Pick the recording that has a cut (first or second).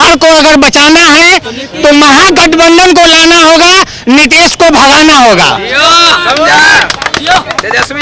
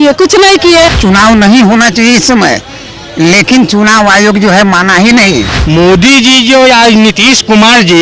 second